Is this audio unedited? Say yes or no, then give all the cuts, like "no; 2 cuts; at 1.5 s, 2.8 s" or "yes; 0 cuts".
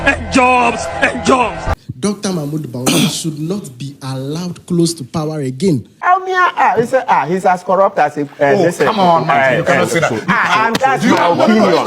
no; 2 cuts; at 1.8 s, 6.1 s